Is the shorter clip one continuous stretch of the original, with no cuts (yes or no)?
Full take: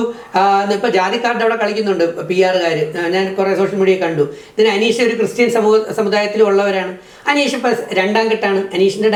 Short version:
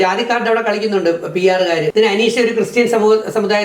no